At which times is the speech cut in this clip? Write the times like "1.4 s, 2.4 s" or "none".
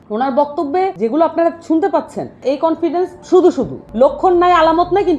0.9 s, 2.4 s, 3.8 s